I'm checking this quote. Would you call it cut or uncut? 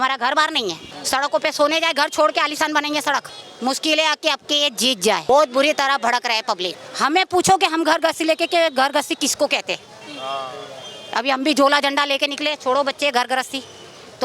cut